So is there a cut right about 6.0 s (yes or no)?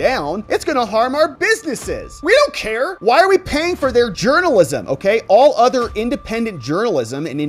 no